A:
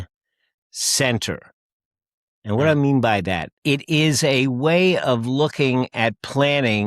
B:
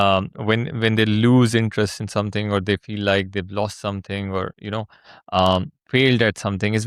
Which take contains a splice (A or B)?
A